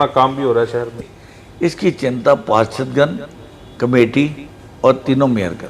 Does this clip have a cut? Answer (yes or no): yes